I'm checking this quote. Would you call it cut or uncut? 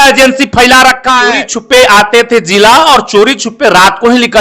cut